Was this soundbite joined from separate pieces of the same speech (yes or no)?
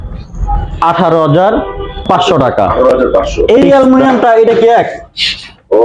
yes